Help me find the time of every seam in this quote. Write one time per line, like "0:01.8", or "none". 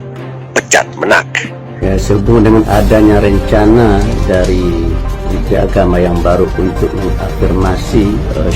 0:01.8